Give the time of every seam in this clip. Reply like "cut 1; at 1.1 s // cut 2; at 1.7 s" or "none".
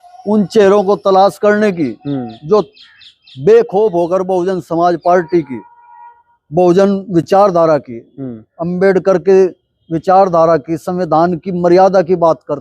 none